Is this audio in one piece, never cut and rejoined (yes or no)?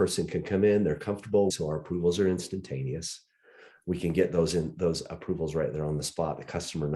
no